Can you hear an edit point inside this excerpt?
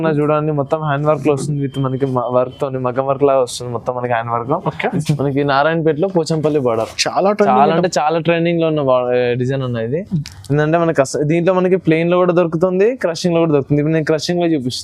yes; 1 cut; at 4.9 s

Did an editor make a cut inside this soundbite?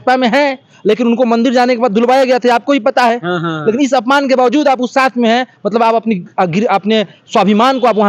no; 0 cuts

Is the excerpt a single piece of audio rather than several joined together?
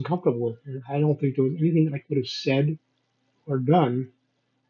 yes; 0 cuts

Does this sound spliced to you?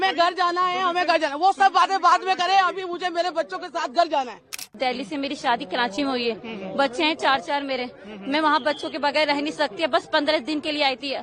yes; 1 cut; at 4.7 s

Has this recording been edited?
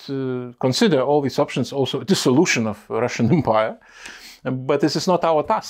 no; 0 cuts

